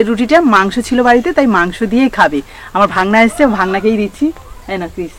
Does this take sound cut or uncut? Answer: uncut